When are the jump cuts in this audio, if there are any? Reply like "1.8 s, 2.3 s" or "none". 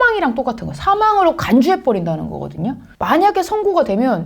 2.9 s